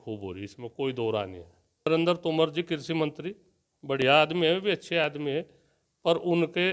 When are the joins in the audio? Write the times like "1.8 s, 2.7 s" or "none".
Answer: 1.9 s